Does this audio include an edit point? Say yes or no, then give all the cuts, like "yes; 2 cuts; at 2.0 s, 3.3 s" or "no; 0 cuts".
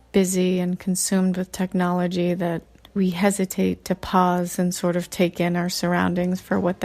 yes; 1 cut; at 2.9 s